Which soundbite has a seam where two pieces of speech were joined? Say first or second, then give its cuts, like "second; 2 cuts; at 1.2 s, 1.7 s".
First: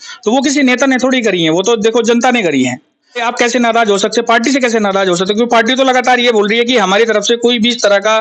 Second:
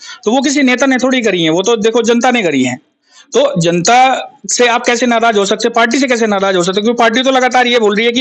first; 1 cut; at 3.2 s